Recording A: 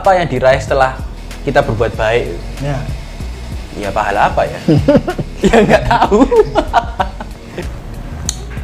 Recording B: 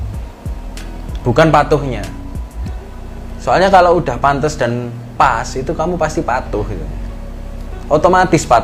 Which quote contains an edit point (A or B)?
A